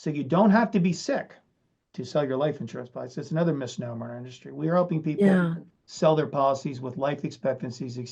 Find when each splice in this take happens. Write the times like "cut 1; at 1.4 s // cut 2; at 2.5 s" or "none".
none